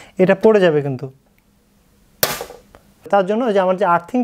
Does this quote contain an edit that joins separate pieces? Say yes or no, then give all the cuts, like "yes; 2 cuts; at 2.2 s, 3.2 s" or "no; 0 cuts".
yes; 1 cut; at 3.1 s